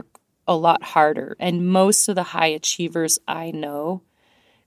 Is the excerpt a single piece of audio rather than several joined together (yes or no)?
yes